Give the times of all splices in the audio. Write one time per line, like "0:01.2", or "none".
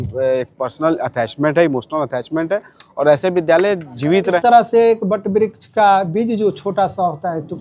0:04.4